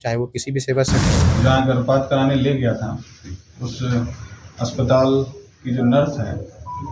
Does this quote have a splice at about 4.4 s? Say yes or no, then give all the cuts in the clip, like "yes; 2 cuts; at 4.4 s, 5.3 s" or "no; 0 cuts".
no; 1 cut; at 1.2 s